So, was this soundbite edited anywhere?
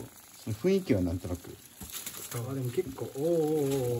yes; 1 cut; at 2.5 s

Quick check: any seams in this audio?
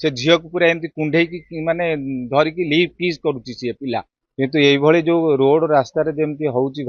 yes; 1 cut; at 4.2 s

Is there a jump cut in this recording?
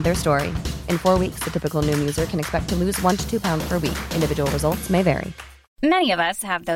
no; 0 cuts

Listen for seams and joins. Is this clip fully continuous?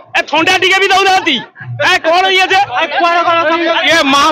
yes; 0 cuts

